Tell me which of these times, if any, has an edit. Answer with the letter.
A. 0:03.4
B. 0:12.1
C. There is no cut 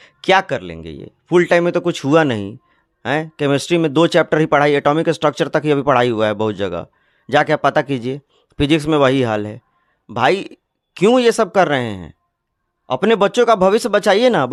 C